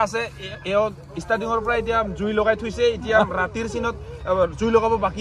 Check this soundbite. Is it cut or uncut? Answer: uncut